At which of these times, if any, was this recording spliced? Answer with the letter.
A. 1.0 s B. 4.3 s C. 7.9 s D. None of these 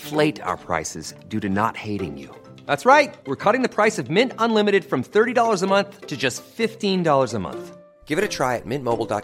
D